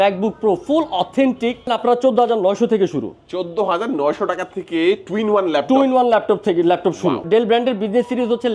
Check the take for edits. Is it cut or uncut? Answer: cut